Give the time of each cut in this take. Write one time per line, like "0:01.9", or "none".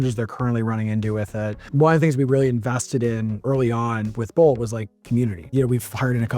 0:01.7
0:05.5